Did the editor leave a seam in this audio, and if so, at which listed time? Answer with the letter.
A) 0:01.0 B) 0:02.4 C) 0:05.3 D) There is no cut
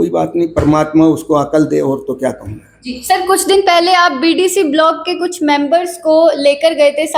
D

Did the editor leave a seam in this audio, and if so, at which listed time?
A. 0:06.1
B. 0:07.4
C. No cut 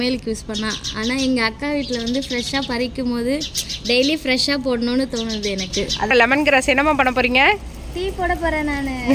A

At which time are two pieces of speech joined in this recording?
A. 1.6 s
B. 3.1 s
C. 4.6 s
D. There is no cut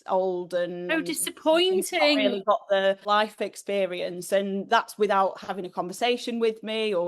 B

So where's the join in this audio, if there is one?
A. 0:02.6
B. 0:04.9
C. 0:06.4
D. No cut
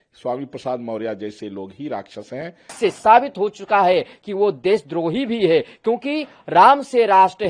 A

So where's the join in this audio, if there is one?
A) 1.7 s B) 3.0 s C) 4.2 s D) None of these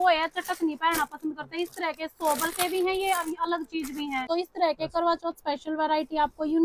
C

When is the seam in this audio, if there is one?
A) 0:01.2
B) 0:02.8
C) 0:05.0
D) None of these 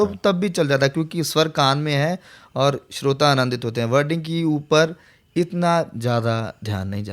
D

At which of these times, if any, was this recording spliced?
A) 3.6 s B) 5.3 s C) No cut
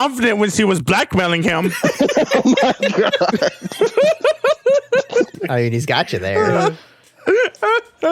B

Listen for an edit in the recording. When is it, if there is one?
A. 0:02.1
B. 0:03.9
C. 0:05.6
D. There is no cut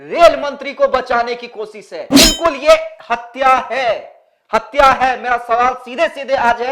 A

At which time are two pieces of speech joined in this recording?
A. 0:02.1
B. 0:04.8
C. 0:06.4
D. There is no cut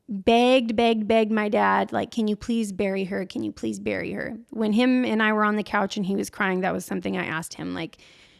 D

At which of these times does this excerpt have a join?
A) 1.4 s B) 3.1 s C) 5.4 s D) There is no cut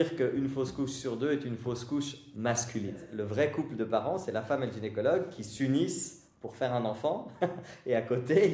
B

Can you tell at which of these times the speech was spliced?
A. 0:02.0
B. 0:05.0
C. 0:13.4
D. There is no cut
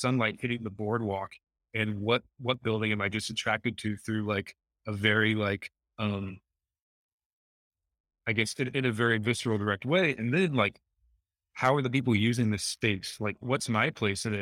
D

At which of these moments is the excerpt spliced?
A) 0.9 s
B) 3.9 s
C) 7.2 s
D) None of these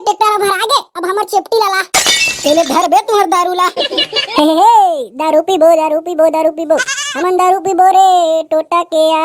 D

